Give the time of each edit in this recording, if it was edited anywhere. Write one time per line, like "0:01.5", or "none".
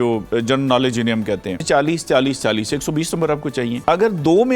0:01.6
0:03.8